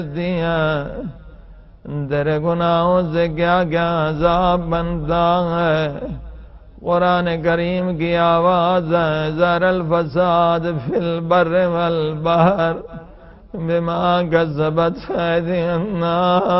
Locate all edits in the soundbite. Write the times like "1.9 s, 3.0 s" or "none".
7.5 s